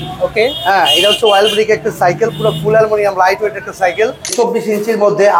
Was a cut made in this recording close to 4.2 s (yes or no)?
yes